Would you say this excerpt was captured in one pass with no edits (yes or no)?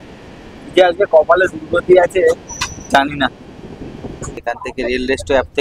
no